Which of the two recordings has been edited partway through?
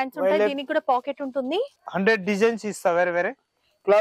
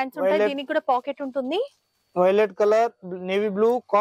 first; 1 cut; at 1.8 s

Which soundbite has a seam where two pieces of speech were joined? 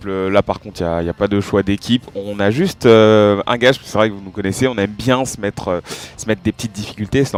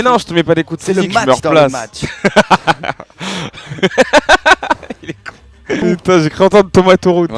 second; 1 cut; at 2.4 s

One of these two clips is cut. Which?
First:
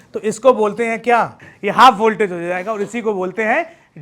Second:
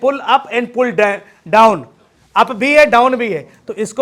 first; 1 cut; at 1.4 s

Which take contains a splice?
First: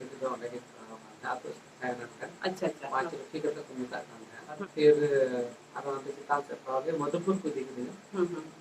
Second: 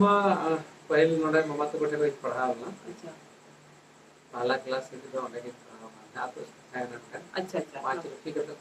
first; 1 cut; at 4.6 s

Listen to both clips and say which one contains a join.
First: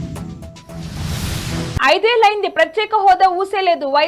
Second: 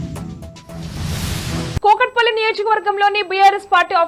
second; 1 cut; at 1.8 s

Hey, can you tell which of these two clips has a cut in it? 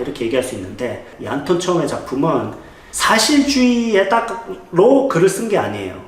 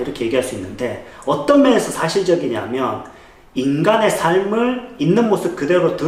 first; 1 cut; at 1.1 s

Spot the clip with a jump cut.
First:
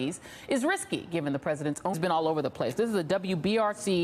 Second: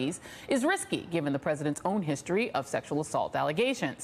second; 1 cut; at 1.9 s

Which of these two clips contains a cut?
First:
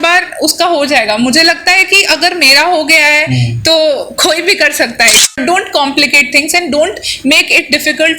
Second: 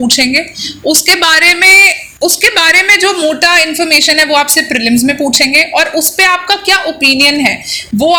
first; 1 cut; at 5.4 s

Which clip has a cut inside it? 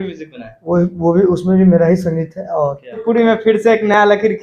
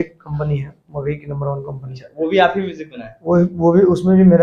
first; 1 cut; at 3.0 s

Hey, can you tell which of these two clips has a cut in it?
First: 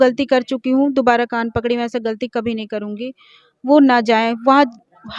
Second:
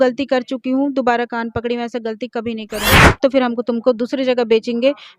second; 1 cut; at 3.2 s

